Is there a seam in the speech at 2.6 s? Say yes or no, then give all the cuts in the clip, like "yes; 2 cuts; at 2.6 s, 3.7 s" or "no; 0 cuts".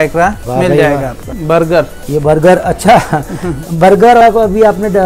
no; 2 cuts; at 1.3 s, 4.2 s